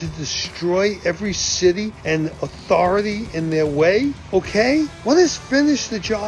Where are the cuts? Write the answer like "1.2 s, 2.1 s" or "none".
2.0 s